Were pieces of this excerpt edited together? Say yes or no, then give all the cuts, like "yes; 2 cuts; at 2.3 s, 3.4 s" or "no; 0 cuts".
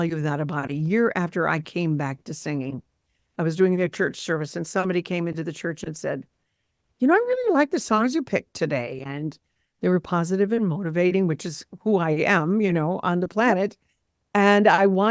no; 0 cuts